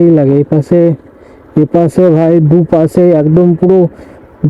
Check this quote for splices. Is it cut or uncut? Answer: uncut